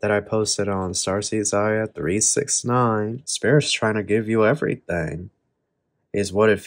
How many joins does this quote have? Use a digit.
1